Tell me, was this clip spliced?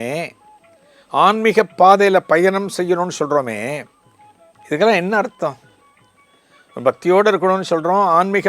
no; 0 cuts

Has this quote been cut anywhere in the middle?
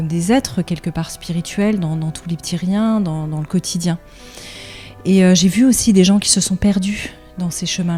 no; 0 cuts

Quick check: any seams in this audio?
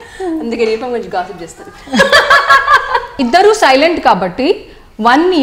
yes; 1 cut; at 3.1 s

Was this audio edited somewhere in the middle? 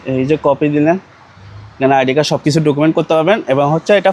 no; 0 cuts

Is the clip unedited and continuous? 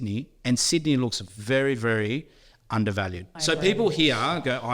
no; 1 cut; at 3.3 s

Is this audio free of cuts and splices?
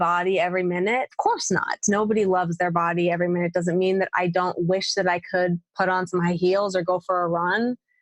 no; 1 cut; at 1.1 s

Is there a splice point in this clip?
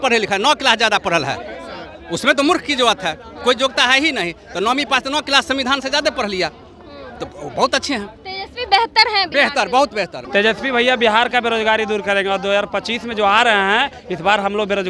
no; 0 cuts

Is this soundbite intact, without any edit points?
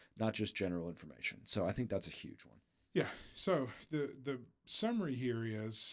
yes; 0 cuts

